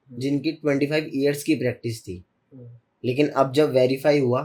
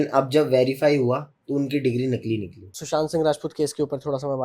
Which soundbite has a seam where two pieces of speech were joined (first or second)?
second